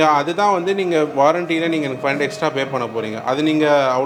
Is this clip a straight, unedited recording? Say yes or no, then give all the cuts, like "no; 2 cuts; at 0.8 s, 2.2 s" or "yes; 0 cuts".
yes; 0 cuts